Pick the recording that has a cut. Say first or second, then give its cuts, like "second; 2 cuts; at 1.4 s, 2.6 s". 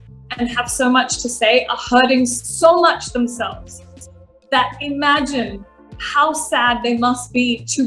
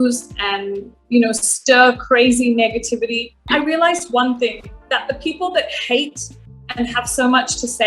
second; 1 cut; at 3.5 s